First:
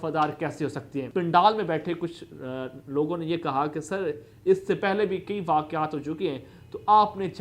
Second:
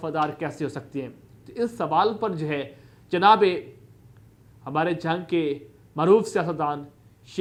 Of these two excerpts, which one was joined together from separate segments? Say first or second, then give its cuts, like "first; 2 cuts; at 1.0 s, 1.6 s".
first; 1 cut; at 1.1 s